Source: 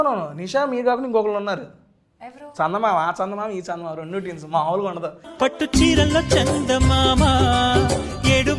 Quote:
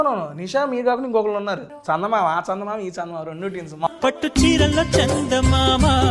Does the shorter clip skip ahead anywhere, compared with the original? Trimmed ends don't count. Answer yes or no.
yes